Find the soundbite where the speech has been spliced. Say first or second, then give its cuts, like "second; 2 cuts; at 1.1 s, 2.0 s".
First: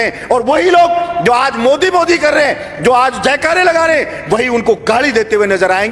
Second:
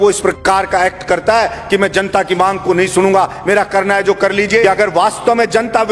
second; 1 cut; at 4.6 s